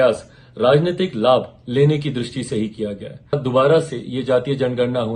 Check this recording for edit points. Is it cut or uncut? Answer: cut